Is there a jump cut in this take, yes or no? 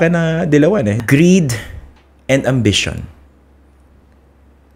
yes